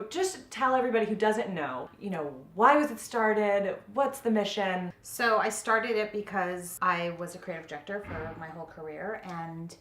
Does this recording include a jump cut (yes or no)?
yes